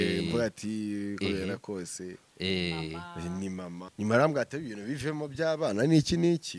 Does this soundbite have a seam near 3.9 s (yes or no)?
yes